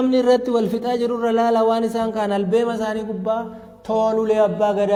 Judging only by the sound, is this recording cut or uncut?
uncut